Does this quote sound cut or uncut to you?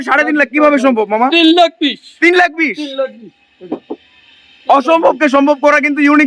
uncut